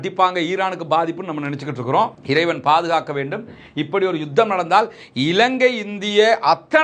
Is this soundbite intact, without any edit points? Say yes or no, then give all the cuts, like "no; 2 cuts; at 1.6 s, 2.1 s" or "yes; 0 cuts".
yes; 0 cuts